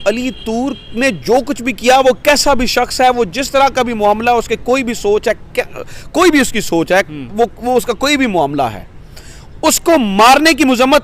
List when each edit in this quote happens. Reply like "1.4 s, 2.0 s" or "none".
none